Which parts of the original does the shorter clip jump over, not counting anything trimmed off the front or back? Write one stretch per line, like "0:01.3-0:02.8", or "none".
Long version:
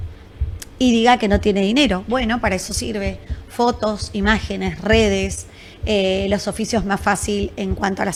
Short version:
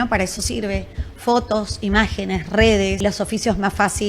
0:05.3-0:06.3